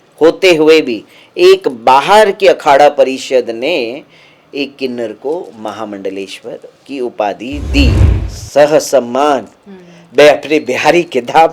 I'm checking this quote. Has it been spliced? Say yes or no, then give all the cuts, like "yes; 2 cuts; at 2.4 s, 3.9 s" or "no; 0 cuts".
yes; 1 cut; at 8.1 s